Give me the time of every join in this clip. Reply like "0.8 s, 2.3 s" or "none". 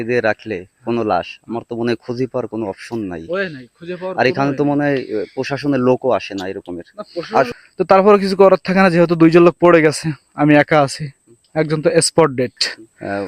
7.5 s